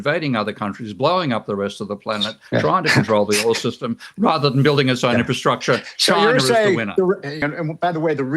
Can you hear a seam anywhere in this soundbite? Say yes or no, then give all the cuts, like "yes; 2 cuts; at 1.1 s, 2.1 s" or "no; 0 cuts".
yes; 1 cut; at 7.5 s